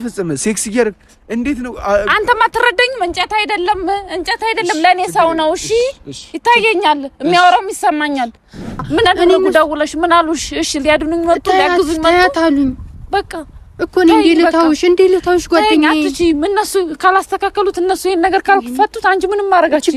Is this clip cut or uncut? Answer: cut